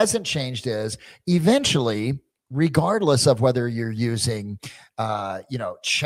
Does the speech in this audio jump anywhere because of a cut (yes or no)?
no